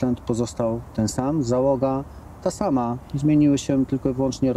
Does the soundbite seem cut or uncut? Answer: uncut